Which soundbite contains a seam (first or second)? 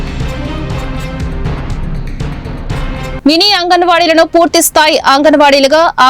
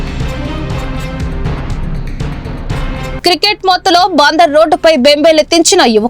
second